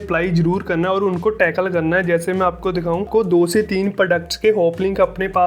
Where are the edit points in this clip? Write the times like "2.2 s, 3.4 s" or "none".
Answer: 3.1 s